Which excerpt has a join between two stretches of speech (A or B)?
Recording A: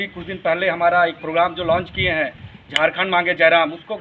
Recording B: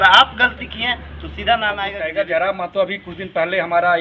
B